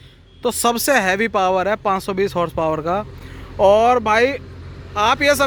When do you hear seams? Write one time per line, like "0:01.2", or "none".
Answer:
none